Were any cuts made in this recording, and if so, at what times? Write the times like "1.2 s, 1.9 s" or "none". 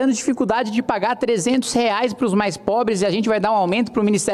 none